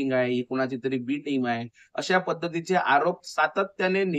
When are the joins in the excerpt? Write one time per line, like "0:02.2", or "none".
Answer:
none